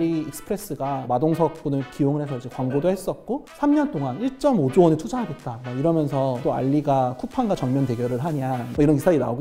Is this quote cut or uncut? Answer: cut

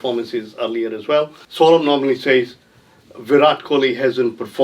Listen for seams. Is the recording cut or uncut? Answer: cut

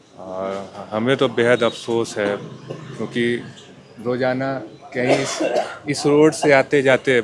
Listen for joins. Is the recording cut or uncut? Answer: uncut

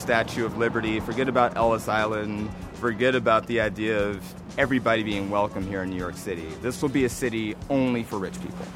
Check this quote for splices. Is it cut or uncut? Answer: uncut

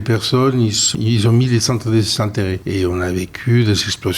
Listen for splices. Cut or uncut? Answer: cut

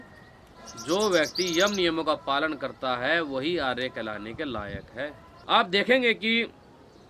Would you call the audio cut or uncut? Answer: cut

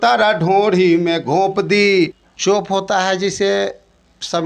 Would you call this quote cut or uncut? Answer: cut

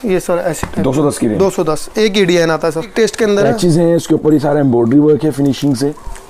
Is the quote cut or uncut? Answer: cut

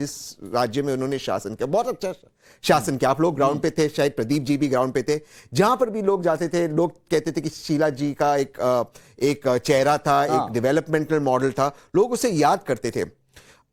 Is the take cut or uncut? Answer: uncut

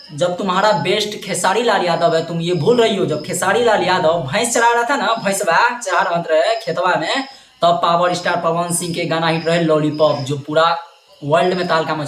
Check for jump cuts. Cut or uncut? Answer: uncut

